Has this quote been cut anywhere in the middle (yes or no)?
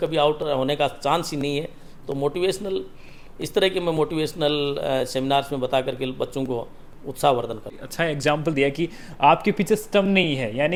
no